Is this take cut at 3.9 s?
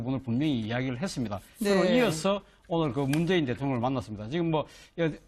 yes; 1 cut; at 3.9 s

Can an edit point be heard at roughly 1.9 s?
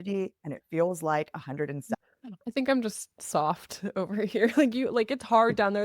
yes; 1 cut; at 1.9 s

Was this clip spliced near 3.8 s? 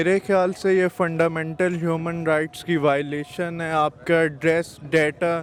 no; 0 cuts

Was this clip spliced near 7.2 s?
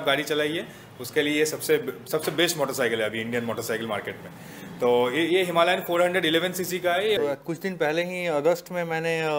yes; 1 cut; at 7.2 s

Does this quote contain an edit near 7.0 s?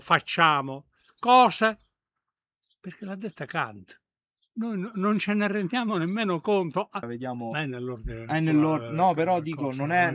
yes; 1 cut; at 7.0 s

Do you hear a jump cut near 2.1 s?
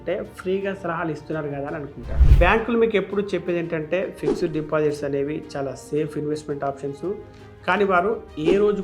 yes; 1 cut; at 2.1 s

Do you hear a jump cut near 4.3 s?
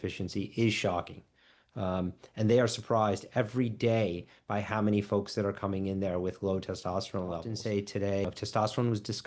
no; 2 cuts; at 7.5 s, 8.3 s

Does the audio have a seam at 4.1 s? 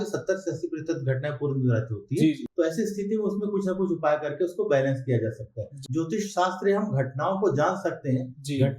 no; 2 cuts; at 2.4 s, 5.7 s

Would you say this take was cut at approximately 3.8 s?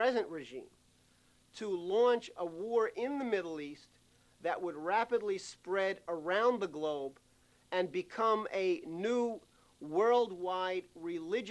no; 1 cut; at 6.0 s

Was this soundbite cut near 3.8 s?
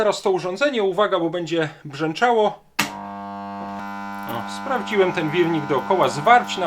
yes; 1 cut; at 3.8 s

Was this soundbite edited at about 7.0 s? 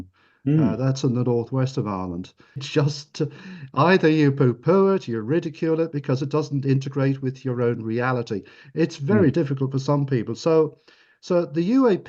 no; 1 cut; at 2.7 s

